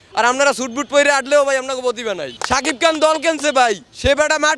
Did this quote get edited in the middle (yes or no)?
yes